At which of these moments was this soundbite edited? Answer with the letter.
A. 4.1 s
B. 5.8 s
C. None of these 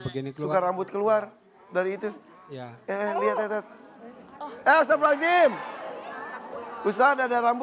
B